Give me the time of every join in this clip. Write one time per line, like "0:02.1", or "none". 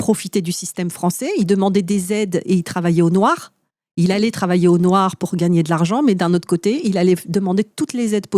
none